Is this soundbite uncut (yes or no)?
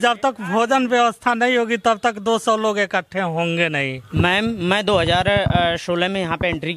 no